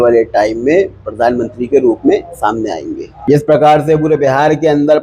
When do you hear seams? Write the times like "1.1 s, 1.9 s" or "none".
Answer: 3.3 s